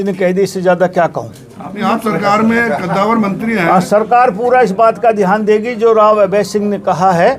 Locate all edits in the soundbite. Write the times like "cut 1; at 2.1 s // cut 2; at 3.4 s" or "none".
none